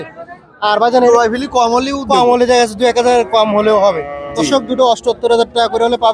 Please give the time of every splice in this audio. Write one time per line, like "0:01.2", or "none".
0:00.9

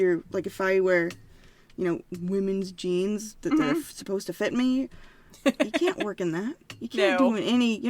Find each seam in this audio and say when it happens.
none

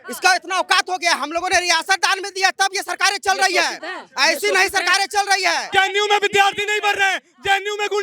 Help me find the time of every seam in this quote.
0:05.6

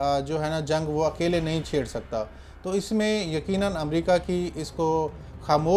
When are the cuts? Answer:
none

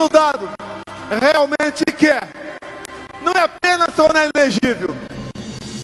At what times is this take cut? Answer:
none

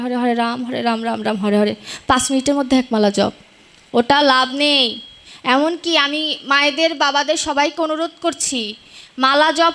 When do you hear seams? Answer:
none

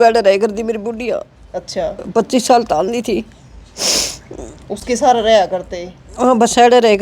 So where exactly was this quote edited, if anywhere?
none

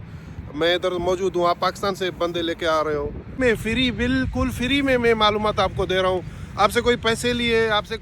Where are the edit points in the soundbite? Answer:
0:03.4

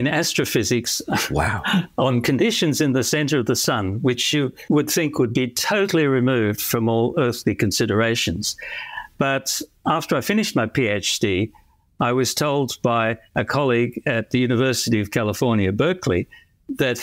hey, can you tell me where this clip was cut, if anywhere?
none

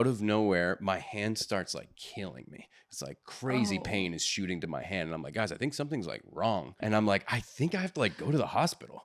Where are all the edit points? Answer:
0:06.8

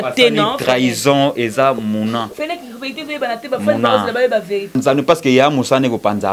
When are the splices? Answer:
0:04.8

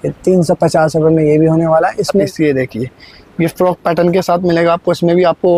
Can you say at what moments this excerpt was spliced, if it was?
0:02.2

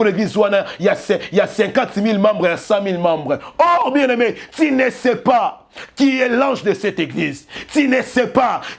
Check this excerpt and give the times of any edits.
none

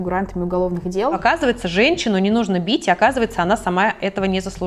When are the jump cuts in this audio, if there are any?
0:01.2

